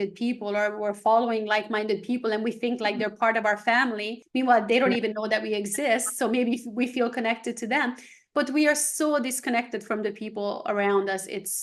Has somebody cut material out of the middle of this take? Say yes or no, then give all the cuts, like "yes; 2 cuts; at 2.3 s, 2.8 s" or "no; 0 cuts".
yes; 1 cut; at 4.2 s